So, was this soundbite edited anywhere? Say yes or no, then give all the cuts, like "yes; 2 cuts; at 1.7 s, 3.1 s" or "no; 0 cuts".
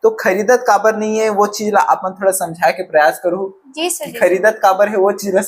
no; 0 cuts